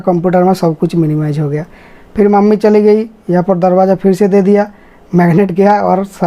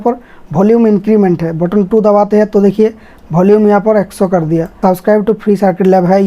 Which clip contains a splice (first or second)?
second